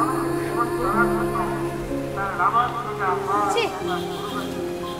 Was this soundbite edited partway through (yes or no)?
no